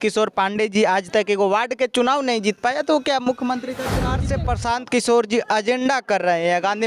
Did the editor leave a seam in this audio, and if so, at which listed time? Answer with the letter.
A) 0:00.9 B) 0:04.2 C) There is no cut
B